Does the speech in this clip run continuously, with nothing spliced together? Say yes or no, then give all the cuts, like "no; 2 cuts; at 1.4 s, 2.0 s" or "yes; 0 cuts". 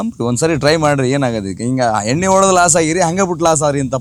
yes; 0 cuts